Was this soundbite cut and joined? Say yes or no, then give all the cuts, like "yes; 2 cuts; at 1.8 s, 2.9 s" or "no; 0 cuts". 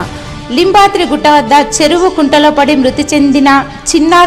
no; 0 cuts